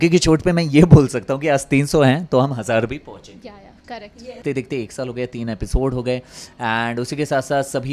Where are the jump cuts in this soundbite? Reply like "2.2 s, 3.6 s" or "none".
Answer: 4.4 s